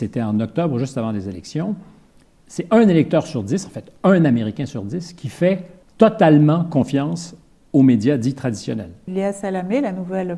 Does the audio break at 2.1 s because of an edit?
no; 2 cuts; at 5.8 s, 9.1 s

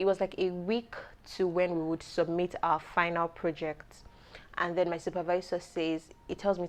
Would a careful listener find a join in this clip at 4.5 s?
no; 0 cuts

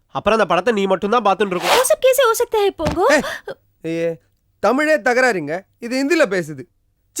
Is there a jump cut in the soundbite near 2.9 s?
no; 1 cut; at 1.6 s

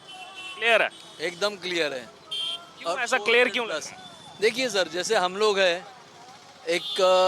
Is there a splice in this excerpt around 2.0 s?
no; 0 cuts

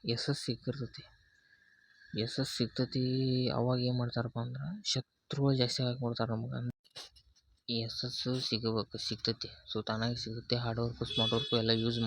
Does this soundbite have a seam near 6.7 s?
yes; 1 cut; at 6.7 s

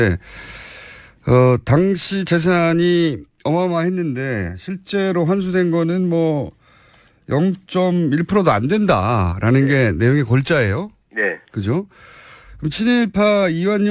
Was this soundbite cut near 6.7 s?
no; 1 cut; at 10.9 s

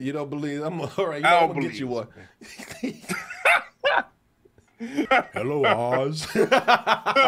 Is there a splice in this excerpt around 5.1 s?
yes; 1 cut; at 5.1 s

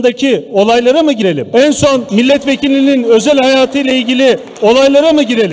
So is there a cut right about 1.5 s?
yes; 2 cuts; at 1.5 s, 2.1 s

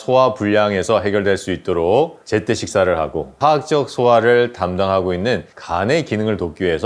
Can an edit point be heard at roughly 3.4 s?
yes; 1 cut; at 3.4 s

